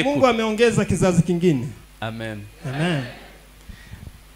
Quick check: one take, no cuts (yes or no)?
yes